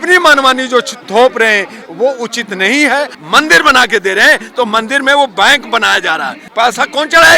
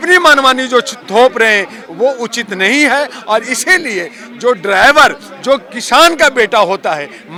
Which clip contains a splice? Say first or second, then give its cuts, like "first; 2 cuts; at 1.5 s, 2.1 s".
first; 2 cuts; at 3.2 s, 6.4 s